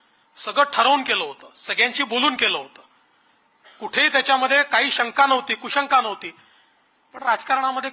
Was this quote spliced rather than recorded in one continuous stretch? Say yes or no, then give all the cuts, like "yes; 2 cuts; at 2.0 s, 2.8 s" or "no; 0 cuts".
no; 0 cuts